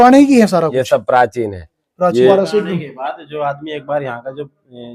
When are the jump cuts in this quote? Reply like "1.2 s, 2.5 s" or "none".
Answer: 2.3 s

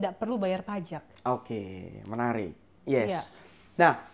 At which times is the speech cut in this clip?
none

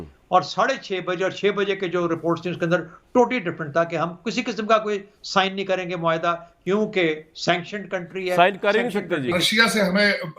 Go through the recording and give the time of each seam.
9.4 s

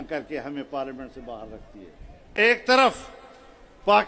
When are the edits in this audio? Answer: 2.3 s

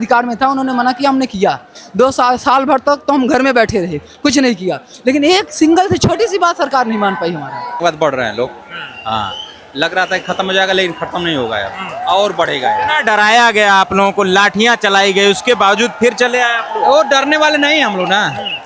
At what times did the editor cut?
7.8 s

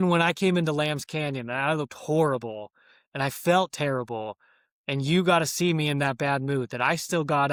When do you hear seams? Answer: none

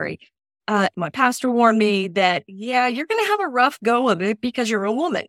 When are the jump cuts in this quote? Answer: 0.9 s

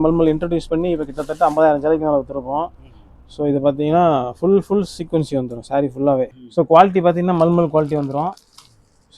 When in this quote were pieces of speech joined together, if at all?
6.4 s

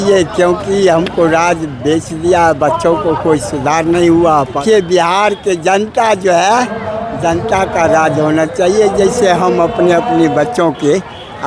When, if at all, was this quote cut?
4.6 s

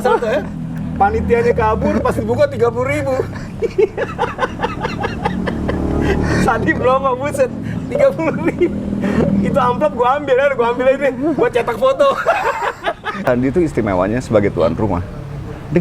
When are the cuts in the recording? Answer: 13.2 s

